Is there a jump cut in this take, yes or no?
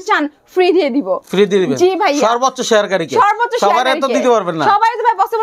no